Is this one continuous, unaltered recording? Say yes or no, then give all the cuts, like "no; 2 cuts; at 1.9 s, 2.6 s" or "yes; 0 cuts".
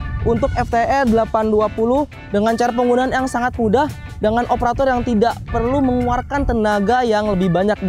yes; 0 cuts